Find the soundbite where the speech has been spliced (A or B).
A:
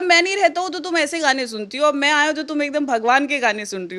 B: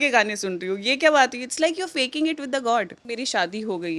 B